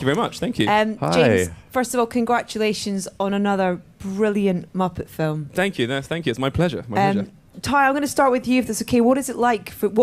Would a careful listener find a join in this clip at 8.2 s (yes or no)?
no